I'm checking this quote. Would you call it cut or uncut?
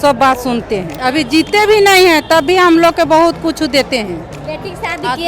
cut